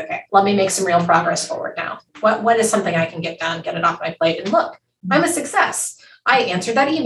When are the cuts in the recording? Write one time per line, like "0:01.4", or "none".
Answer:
none